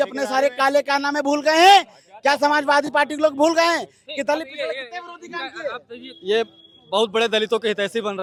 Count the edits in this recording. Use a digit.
0